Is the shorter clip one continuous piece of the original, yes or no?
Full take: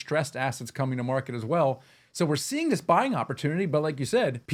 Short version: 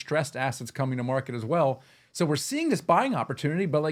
yes